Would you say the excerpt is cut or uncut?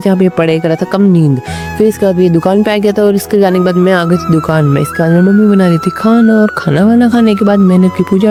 uncut